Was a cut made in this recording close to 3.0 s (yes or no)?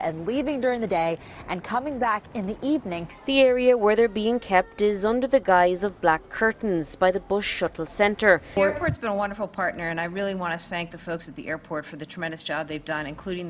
yes